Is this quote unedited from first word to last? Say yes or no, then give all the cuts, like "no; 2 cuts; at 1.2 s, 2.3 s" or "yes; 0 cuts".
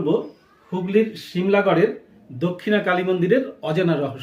yes; 0 cuts